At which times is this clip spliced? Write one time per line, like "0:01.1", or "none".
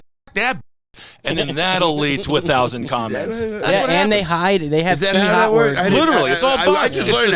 none